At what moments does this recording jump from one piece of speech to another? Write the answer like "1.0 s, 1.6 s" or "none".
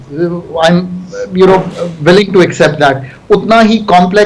none